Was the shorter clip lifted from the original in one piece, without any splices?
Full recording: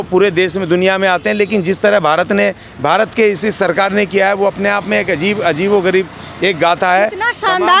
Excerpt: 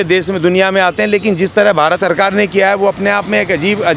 no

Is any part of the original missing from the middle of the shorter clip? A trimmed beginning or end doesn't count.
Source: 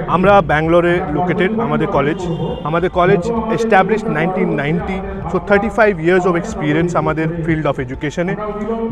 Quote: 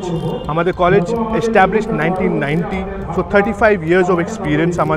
no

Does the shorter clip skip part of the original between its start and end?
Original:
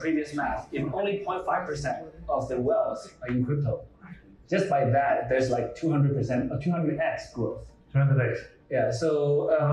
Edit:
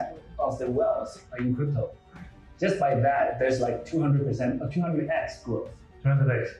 no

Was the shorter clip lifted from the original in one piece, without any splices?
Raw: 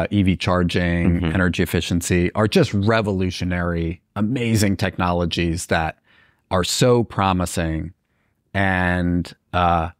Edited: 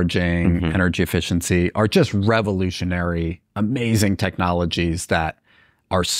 yes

